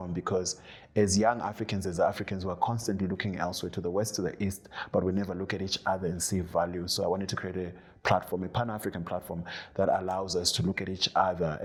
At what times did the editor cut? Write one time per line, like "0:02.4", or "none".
none